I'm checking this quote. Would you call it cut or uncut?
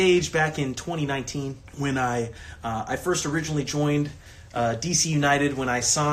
cut